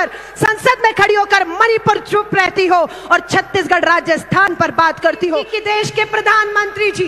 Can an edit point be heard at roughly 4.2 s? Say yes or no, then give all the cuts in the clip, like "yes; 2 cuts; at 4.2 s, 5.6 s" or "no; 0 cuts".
no; 1 cut; at 5.5 s